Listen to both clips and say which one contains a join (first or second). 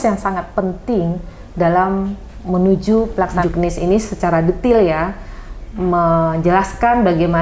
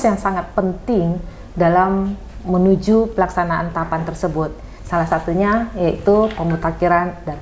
first